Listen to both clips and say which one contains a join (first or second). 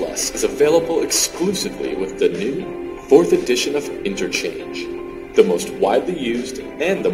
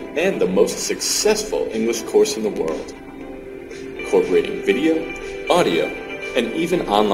second